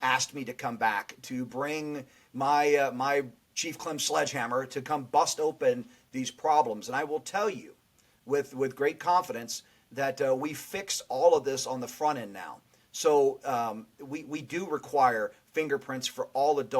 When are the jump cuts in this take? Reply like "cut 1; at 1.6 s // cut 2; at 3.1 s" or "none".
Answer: cut 1; at 3.5 s